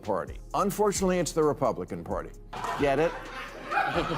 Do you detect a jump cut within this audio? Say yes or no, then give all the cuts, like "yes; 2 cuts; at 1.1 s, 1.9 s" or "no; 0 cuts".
yes; 1 cut; at 2.4 s